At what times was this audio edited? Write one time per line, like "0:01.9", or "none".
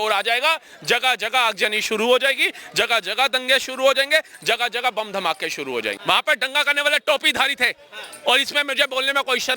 0:05.9